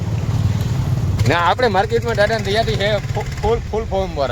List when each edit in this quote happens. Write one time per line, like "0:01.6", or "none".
0:01.2